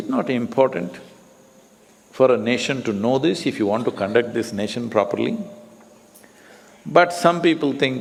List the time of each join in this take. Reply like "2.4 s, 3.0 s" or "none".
none